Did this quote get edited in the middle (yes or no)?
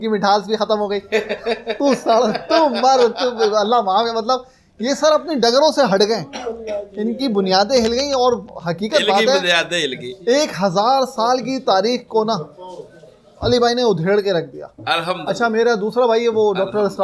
no